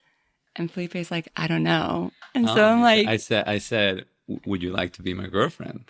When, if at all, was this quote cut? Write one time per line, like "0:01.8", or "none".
0:02.2